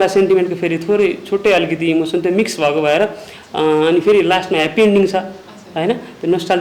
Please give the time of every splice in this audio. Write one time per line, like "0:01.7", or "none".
none